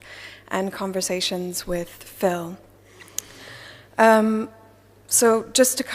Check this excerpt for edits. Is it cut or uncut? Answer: cut